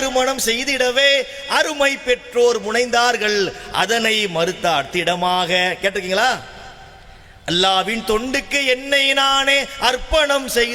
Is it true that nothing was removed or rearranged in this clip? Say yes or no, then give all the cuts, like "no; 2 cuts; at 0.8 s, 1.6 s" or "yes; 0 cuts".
yes; 0 cuts